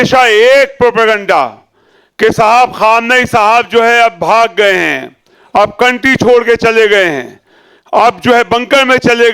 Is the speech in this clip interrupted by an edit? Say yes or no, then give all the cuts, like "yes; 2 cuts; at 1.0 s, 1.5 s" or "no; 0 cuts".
no; 0 cuts